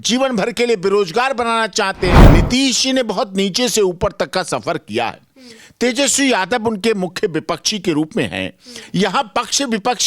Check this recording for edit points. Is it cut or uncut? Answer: cut